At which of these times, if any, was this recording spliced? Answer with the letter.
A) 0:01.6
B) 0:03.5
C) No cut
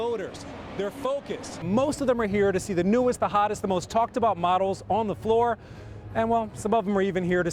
A